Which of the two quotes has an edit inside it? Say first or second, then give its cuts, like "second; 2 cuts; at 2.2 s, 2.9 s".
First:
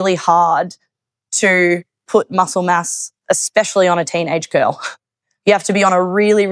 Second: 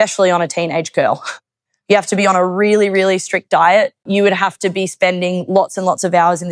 second; 1 cut; at 4.0 s